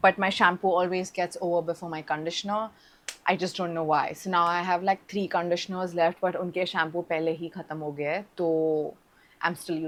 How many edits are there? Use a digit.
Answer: 0